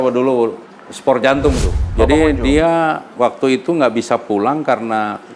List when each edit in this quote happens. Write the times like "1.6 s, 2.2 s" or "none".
1.9 s